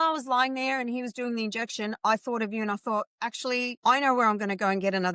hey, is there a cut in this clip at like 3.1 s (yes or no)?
no